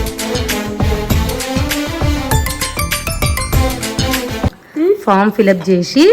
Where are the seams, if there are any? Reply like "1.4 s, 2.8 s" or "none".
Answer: 4.6 s